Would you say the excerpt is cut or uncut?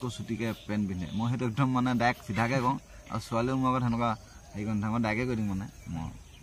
uncut